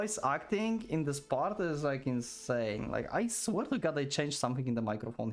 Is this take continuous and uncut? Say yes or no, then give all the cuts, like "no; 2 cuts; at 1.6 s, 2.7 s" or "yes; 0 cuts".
yes; 0 cuts